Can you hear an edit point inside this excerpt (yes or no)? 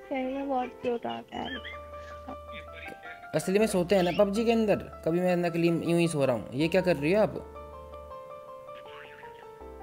no